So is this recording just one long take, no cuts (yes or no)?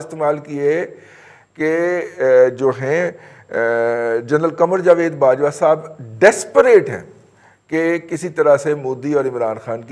yes